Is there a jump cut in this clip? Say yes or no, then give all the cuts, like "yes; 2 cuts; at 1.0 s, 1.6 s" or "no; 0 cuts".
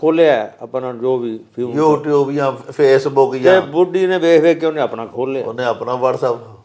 no; 0 cuts